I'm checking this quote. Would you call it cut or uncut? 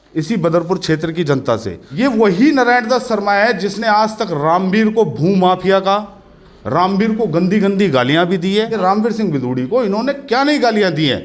cut